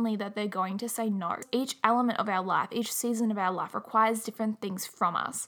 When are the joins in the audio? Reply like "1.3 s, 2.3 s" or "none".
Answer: 1.5 s